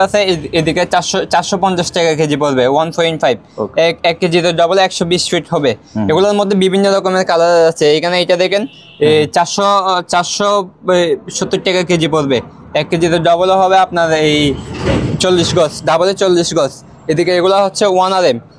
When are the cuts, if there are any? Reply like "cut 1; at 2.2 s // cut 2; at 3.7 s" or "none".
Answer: none

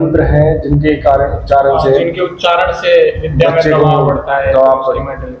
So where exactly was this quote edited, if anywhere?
none

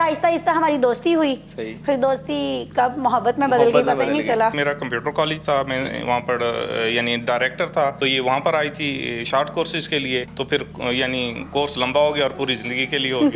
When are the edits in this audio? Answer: cut 1; at 4.6 s // cut 2; at 8.0 s // cut 3; at 10.3 s

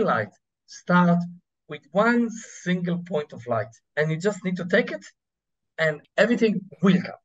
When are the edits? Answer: cut 1; at 3.8 s // cut 2; at 6.0 s

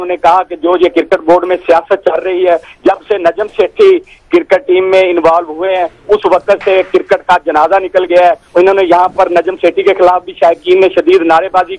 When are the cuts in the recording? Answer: cut 1; at 10.2 s

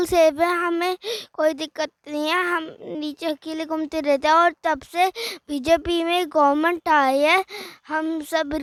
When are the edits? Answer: none

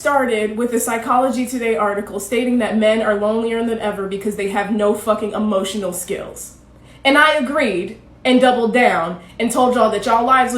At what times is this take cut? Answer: cut 1; at 4.7 s

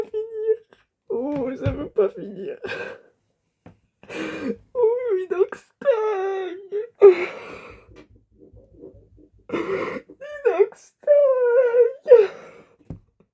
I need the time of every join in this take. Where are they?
none

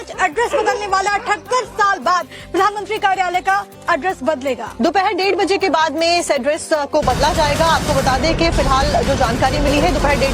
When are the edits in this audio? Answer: cut 1; at 9.3 s

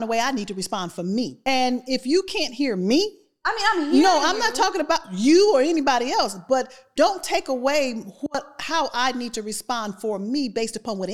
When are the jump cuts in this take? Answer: cut 1; at 1.4 s

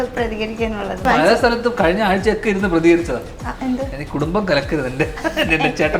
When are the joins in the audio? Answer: cut 1; at 1.0 s

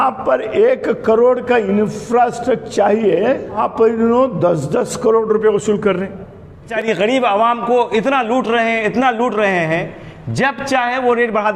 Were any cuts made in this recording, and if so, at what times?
cut 1; at 3.6 s // cut 2; at 6.7 s

